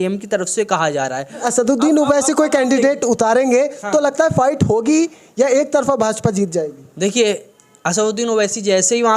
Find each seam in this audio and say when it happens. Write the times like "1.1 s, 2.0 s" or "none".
1.4 s